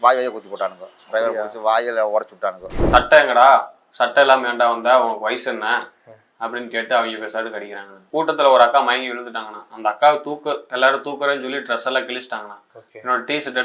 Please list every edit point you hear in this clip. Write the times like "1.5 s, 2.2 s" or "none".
2.7 s, 8.0 s